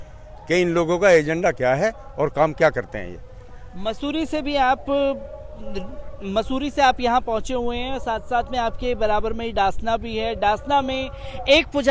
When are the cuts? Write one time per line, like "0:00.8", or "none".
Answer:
none